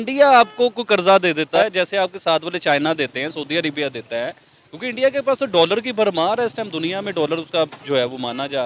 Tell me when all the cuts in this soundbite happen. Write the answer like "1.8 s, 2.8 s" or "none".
none